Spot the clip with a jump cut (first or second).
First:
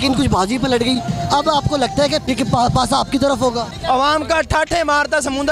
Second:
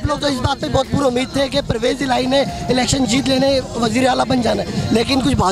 first